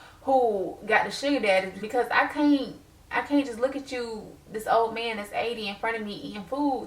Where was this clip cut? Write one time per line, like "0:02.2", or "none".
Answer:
0:01.8